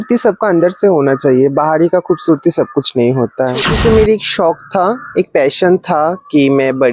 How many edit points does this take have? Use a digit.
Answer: 1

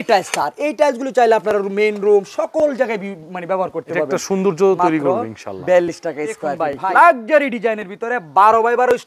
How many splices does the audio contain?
1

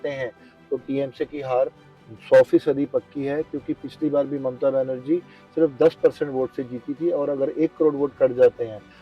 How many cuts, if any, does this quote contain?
0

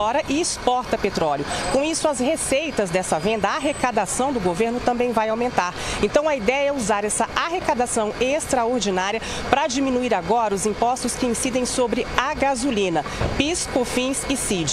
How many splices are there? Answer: 0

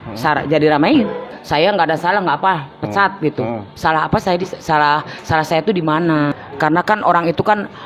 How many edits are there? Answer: 2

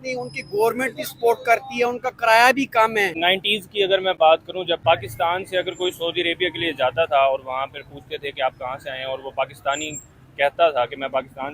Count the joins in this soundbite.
2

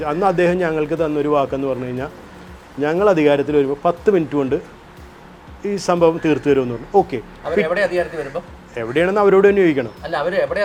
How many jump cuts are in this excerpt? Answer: 0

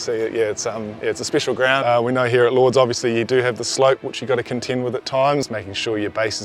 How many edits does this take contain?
2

